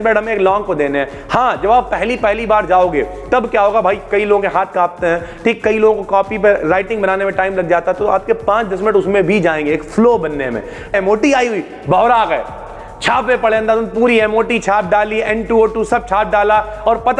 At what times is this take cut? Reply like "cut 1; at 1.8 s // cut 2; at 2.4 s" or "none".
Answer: cut 1; at 10.9 s